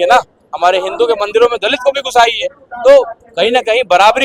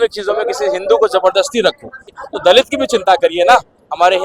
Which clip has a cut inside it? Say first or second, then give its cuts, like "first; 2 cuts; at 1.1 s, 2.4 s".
second; 1 cut; at 2.1 s